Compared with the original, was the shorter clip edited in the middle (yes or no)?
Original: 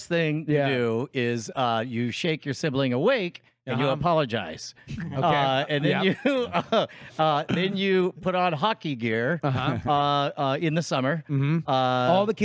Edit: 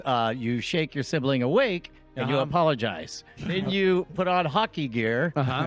yes